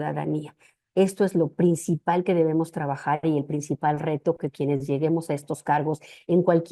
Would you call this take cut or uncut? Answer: uncut